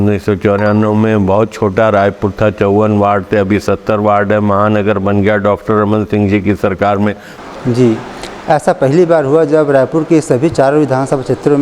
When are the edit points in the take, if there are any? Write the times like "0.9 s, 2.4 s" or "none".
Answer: 7.3 s